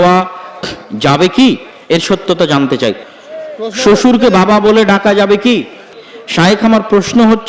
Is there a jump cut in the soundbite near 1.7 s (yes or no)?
no